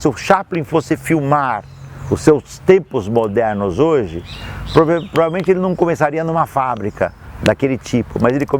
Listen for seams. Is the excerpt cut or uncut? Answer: uncut